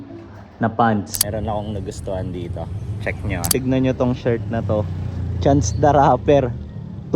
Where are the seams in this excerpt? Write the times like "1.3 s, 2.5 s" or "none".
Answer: 1.2 s, 3.5 s